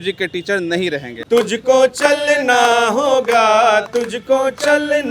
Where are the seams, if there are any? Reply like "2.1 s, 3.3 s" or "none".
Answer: 1.1 s